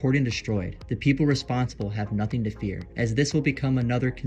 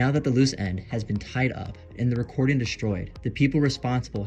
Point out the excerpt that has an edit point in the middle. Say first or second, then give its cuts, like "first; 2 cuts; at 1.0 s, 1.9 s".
first; 1 cut; at 2.8 s